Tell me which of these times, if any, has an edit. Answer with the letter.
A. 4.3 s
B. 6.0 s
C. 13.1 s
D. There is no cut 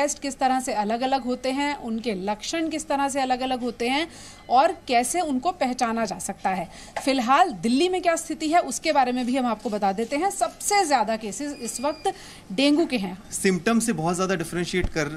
C